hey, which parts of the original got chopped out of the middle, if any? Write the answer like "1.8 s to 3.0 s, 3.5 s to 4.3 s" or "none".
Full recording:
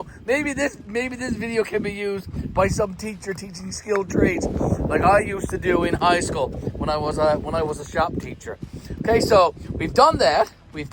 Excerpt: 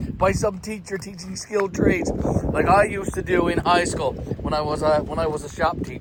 none